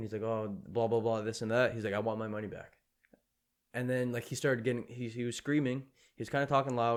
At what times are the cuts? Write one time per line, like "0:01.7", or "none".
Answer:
none